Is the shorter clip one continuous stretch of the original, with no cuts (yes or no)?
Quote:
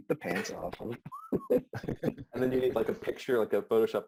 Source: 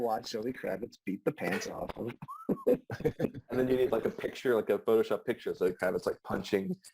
yes